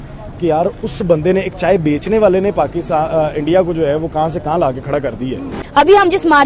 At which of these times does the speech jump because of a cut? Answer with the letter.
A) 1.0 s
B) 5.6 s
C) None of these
B